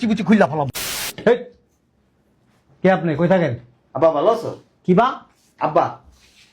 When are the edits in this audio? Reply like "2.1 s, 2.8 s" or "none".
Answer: 1.0 s